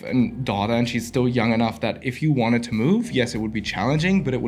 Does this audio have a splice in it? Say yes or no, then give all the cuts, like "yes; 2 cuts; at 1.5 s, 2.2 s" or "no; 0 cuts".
no; 0 cuts